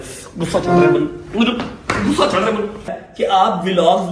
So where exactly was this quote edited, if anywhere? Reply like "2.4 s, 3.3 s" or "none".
3.0 s